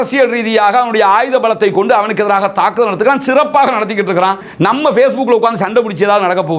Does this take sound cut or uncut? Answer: uncut